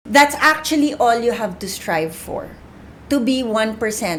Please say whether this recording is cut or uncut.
uncut